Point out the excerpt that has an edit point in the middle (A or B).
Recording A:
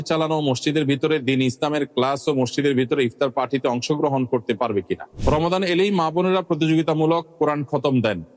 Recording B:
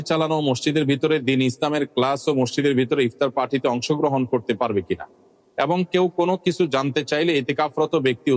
A